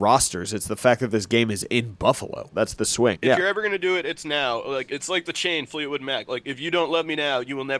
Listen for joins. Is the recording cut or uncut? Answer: cut